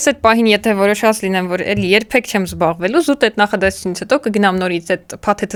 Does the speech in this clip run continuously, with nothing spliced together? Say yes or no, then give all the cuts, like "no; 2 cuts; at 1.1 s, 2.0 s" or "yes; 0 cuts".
yes; 0 cuts